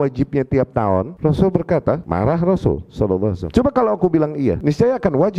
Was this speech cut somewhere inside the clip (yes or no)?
yes